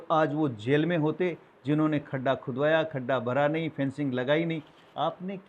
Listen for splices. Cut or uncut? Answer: uncut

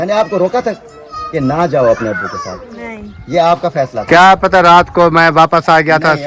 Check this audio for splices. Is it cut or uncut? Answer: uncut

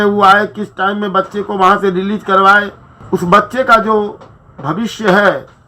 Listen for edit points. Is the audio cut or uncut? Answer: cut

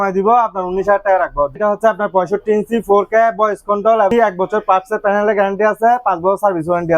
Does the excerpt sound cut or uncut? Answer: cut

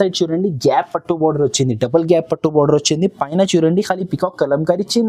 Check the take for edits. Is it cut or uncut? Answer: uncut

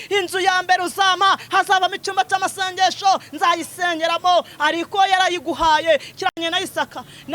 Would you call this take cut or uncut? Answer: cut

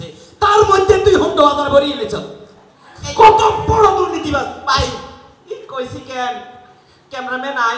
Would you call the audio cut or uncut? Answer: uncut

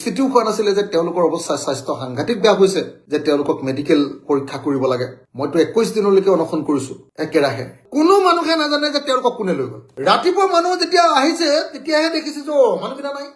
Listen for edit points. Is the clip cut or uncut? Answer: uncut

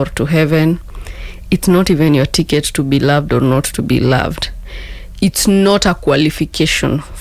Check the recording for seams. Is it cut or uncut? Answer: uncut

